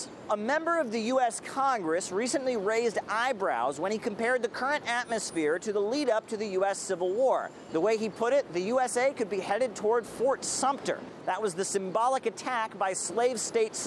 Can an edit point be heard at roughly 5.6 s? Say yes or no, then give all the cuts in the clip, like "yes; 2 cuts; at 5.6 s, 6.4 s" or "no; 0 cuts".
yes; 1 cut; at 5.6 s